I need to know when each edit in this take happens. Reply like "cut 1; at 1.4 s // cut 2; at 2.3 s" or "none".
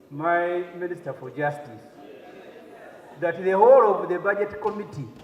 none